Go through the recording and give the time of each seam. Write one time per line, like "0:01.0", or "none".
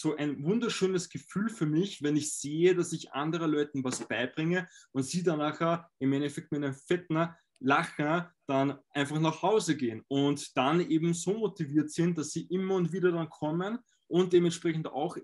none